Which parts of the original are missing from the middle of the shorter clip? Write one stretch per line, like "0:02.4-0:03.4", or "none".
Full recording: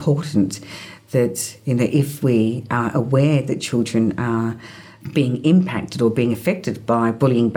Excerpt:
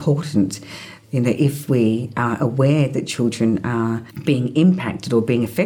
0:00.9-0:01.5
0:04.6-0:05.0